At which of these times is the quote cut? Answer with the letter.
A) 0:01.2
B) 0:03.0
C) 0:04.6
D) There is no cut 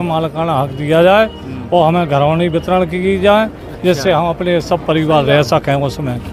D